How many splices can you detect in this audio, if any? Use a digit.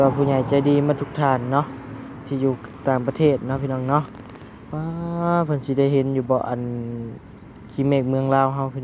0